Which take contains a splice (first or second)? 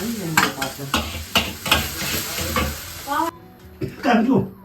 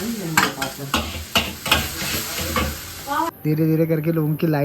second